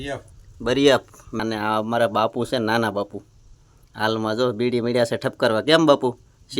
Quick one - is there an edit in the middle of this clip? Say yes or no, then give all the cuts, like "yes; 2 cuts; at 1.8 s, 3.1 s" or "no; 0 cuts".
yes; 1 cut; at 1.4 s